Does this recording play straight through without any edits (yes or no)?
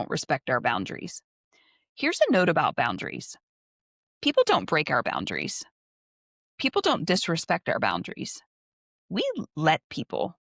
yes